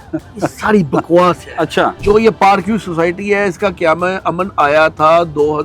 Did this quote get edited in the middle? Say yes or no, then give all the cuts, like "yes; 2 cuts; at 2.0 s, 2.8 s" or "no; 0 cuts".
yes; 1 cut; at 2.0 s